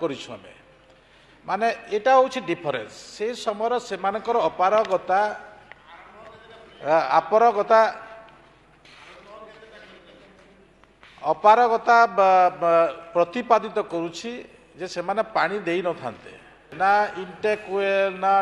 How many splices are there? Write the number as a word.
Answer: one